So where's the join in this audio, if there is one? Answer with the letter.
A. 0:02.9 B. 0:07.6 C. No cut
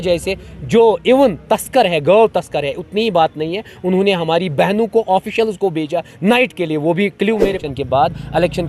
B